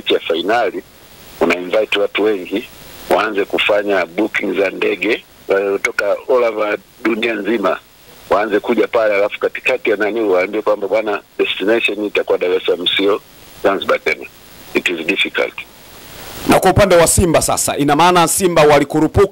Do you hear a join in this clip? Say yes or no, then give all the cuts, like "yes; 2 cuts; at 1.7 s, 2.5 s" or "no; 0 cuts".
no; 0 cuts